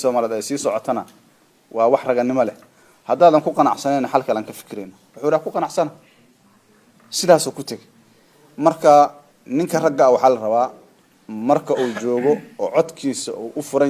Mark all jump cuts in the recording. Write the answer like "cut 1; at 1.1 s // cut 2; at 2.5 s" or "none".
cut 1; at 1.7 s